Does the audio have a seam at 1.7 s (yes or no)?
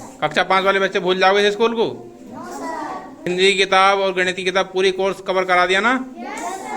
no